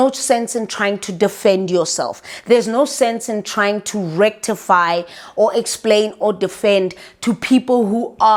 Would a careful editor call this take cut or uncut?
uncut